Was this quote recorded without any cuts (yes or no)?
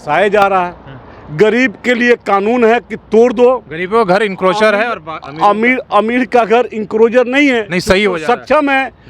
yes